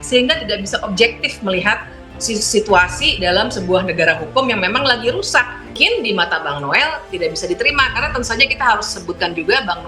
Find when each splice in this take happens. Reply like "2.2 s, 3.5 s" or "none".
5.8 s